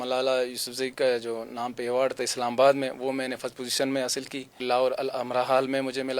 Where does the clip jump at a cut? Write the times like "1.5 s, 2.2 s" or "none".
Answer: 4.6 s